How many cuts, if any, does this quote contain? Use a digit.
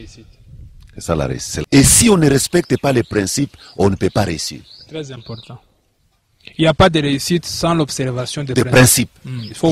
1